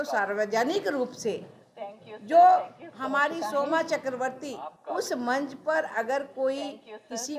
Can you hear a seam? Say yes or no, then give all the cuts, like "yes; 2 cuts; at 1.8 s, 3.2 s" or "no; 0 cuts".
yes; 1 cut; at 4.7 s